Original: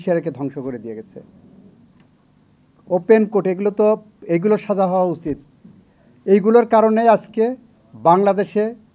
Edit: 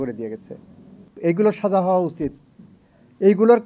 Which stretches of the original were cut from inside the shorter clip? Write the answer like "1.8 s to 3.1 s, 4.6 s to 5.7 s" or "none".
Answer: 1.7 s to 4.1 s